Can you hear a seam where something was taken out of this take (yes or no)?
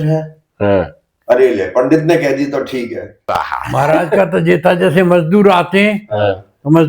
yes